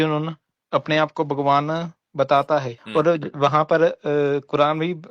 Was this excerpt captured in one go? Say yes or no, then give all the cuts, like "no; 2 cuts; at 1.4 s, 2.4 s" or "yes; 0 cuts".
no; 1 cut; at 2.8 s